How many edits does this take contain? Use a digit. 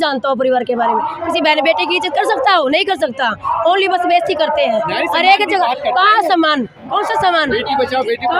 0